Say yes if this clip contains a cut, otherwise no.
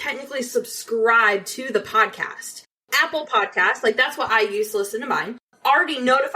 yes